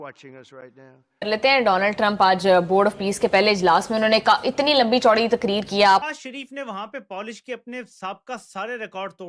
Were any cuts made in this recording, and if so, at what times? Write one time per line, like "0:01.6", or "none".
0:01.2
0:06.0